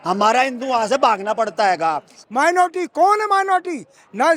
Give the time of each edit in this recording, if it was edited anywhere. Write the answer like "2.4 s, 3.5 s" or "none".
2.1 s

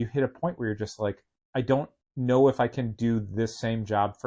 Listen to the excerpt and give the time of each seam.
1.3 s, 2.0 s

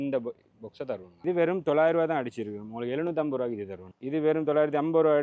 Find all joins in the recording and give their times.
1.2 s

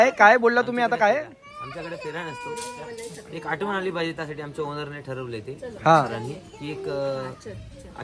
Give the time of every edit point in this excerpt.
none

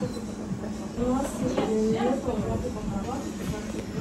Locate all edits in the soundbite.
none

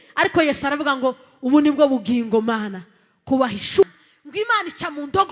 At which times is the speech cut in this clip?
3.8 s

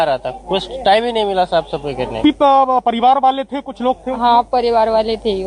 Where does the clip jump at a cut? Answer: none

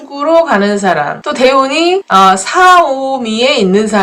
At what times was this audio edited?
1.2 s, 2.1 s

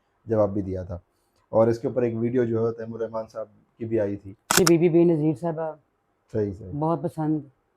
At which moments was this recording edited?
4.6 s

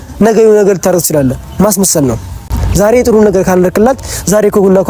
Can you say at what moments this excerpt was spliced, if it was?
none

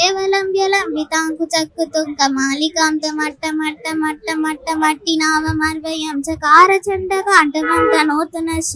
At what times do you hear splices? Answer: none

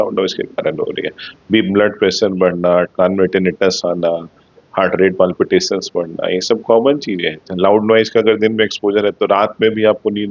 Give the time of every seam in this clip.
none

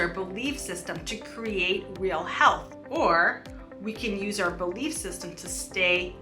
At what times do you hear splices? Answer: 2.7 s

